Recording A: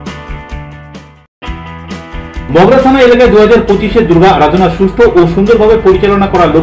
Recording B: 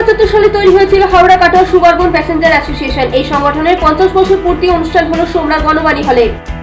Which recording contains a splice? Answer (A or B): A